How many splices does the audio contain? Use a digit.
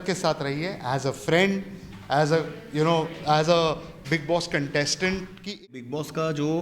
1